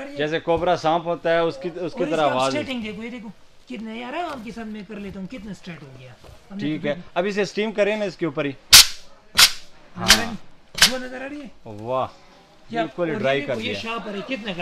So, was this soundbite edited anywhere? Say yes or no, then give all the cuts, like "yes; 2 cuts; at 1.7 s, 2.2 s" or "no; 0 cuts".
no; 0 cuts